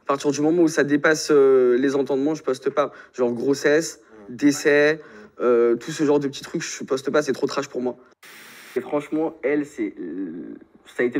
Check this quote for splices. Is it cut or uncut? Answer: cut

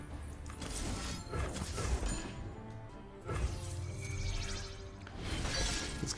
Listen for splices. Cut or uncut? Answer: cut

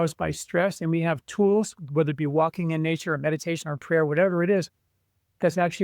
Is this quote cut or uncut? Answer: uncut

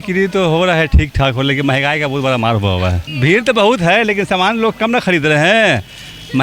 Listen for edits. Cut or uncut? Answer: cut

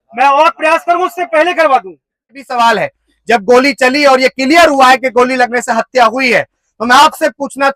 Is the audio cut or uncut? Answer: cut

